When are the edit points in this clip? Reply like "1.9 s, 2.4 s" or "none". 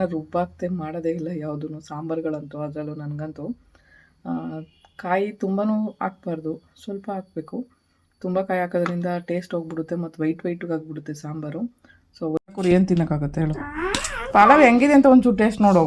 12.4 s